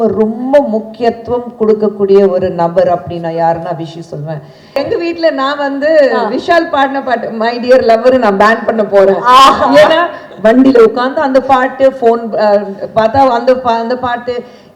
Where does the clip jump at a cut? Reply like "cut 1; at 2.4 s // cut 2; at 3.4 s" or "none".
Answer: cut 1; at 4.6 s

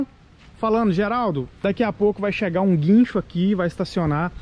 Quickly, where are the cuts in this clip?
cut 1; at 1.5 s

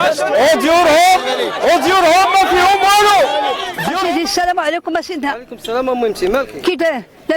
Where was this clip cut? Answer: cut 1; at 3.6 s

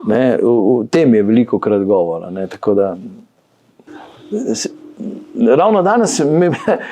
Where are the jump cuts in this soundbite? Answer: cut 1; at 3.9 s

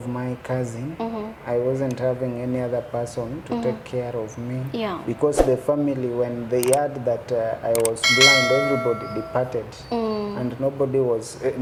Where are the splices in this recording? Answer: none

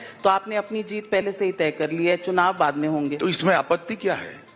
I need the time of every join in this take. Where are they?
cut 1; at 3.2 s

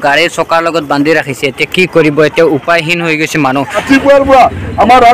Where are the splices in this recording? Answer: cut 1; at 3.8 s

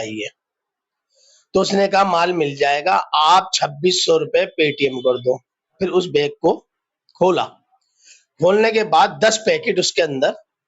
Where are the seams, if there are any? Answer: cut 1; at 5.7 s

